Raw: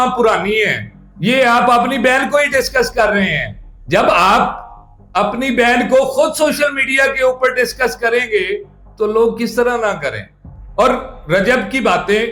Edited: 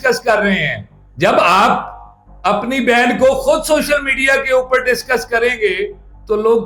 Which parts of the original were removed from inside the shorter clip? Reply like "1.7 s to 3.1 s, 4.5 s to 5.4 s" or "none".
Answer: none